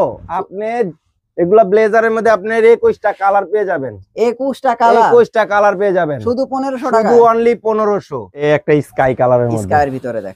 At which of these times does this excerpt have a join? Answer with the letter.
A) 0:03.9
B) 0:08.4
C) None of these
B